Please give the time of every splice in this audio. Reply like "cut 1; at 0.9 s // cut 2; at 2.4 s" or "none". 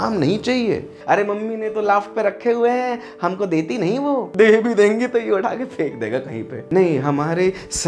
cut 1; at 1.0 s // cut 2; at 4.3 s // cut 3; at 6.6 s